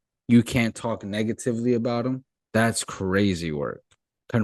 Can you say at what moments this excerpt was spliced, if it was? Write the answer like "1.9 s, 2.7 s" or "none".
2.3 s